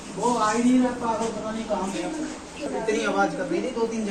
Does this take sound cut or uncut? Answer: cut